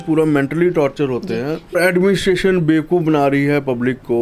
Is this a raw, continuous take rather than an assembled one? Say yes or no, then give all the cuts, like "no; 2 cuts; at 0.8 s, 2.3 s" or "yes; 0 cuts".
no; 1 cut; at 1.7 s